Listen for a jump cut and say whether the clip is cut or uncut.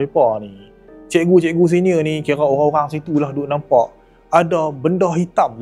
uncut